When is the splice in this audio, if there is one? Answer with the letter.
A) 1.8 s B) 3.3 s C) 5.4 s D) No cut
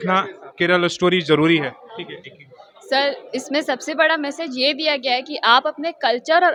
D